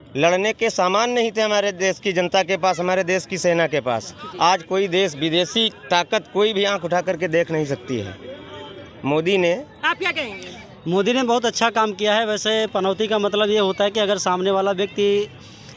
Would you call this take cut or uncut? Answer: uncut